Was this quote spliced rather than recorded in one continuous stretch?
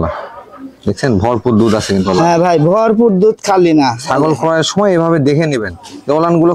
no; 0 cuts

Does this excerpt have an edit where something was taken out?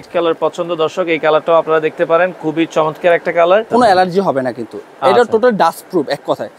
yes; 1 cut; at 3.7 s

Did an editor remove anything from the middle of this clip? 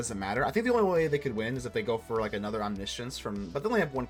no; 0 cuts

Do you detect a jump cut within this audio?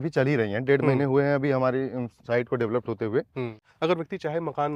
yes; 1 cut; at 3.7 s

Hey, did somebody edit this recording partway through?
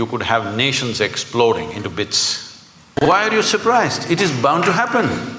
yes; 1 cut; at 3.1 s

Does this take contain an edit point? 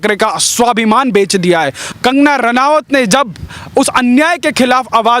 yes; 1 cut; at 1.8 s

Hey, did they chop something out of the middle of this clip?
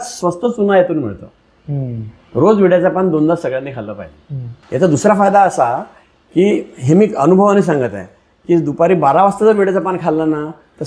no; 0 cuts

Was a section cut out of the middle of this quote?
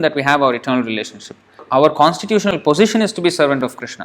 yes; 1 cut; at 1.6 s

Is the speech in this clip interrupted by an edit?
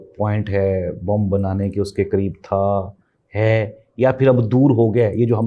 no; 0 cuts

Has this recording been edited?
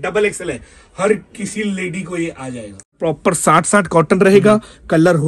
yes; 1 cut; at 2.9 s

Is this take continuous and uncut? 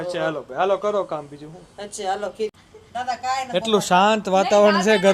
no; 1 cut; at 2.5 s

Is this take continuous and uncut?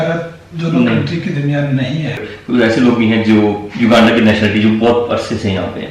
no; 1 cut; at 2.2 s

